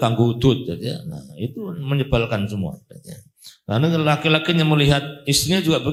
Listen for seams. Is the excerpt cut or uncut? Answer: uncut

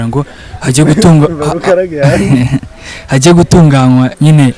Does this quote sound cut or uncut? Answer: uncut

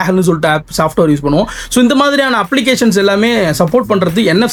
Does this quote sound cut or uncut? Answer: uncut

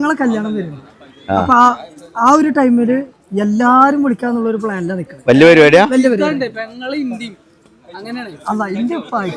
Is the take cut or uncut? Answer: uncut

